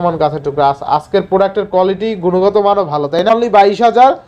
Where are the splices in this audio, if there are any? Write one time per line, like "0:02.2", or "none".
0:03.3